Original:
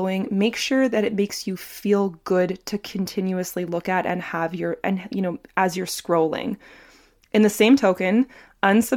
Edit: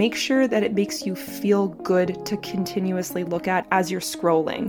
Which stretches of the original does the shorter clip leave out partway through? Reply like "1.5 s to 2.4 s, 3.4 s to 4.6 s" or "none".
4.0 s to 5.5 s